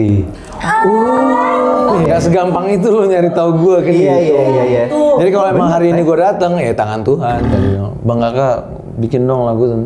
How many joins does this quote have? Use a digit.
2